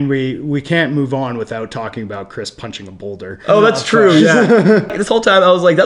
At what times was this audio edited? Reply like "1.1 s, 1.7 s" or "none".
5.0 s